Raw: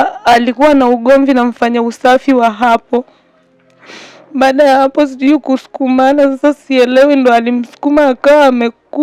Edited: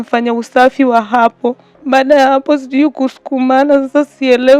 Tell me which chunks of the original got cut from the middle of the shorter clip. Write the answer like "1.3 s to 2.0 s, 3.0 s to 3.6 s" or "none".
3.2 s to 4.2 s

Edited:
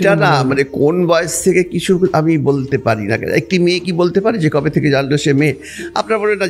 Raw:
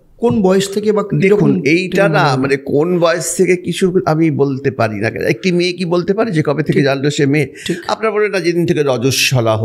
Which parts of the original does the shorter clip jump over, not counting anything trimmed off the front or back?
none

